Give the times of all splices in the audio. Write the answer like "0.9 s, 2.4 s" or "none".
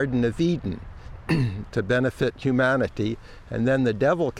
none

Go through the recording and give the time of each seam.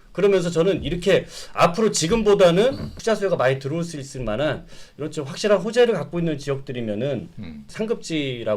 2.9 s

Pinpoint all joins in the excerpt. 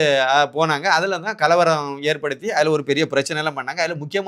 none

